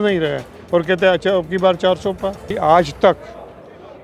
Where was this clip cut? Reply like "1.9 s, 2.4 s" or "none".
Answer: 2.5 s